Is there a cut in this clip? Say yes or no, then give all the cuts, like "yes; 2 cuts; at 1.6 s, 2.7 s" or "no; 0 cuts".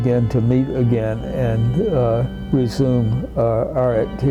no; 0 cuts